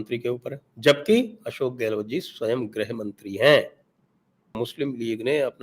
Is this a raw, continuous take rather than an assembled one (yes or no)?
no